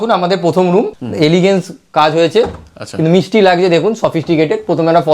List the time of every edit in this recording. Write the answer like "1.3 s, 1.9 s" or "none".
1.0 s